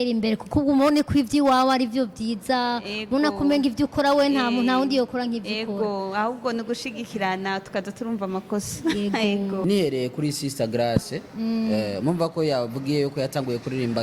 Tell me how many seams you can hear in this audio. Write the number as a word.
one